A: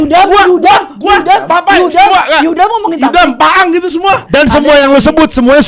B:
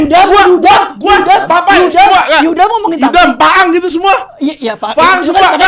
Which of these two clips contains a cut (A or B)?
A